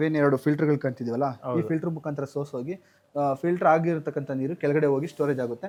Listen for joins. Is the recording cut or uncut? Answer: uncut